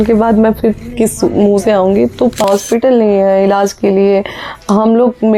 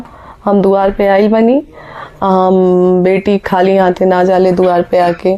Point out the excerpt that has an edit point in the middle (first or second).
first